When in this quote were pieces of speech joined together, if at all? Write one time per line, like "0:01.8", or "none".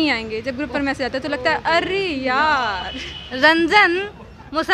0:03.3